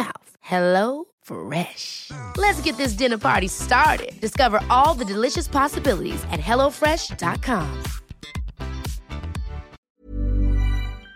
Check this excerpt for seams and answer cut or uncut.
cut